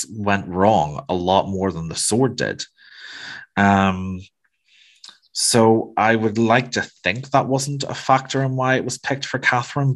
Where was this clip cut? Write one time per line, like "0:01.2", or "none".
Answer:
none

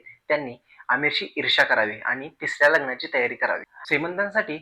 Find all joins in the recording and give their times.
0:03.7

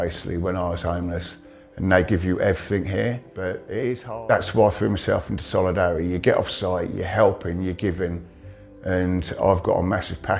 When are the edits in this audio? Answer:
0:03.7

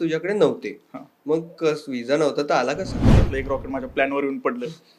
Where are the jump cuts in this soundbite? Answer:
0:03.3

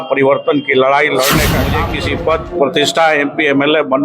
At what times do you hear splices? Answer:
0:01.8

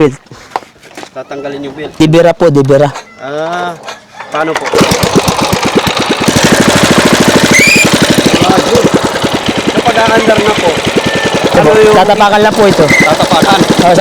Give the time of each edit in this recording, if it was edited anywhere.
0:02.0
0:06.3
0:09.4

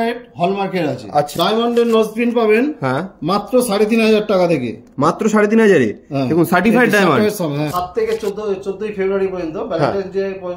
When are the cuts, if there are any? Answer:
0:01.3
0:07.7

